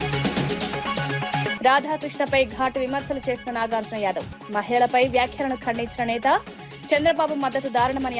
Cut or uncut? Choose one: cut